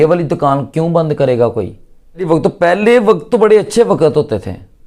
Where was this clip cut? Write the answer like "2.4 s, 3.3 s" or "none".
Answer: 2.3 s